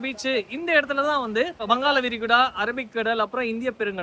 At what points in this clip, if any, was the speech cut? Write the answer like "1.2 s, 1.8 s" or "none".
1.6 s